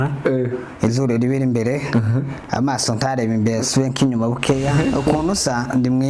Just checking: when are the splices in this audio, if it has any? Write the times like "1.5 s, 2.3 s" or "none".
4.8 s